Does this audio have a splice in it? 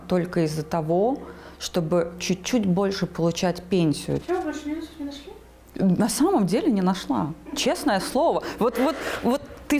yes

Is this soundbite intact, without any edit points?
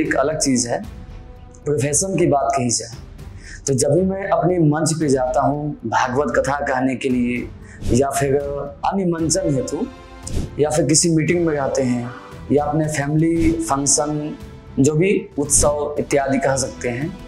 no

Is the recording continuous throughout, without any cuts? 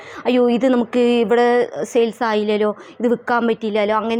yes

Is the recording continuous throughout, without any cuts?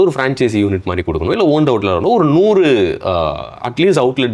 yes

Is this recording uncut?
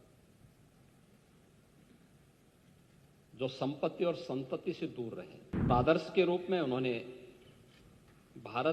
no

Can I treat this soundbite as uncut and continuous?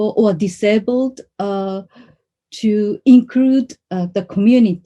yes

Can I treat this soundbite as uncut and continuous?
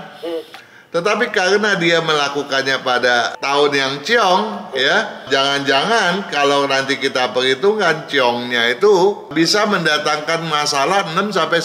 no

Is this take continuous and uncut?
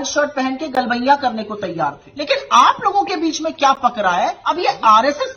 no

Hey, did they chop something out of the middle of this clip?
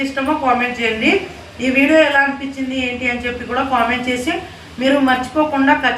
no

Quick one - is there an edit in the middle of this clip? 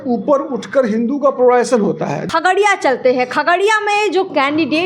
yes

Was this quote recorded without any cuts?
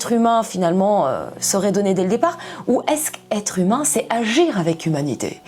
yes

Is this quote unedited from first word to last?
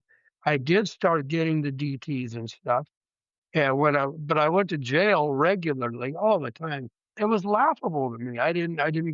no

